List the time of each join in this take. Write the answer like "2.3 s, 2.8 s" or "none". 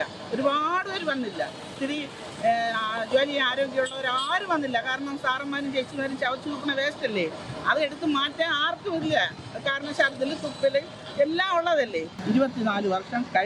12.1 s